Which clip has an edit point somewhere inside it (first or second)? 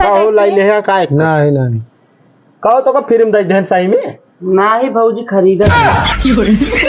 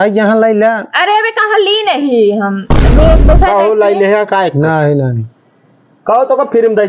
first